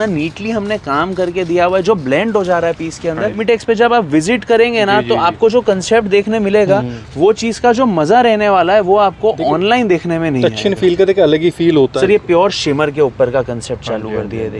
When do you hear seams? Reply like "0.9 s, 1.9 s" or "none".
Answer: 3.4 s, 11.9 s